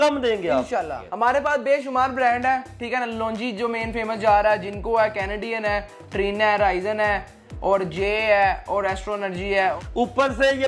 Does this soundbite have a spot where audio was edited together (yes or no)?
yes